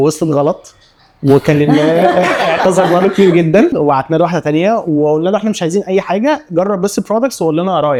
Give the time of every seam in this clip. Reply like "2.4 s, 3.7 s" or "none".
none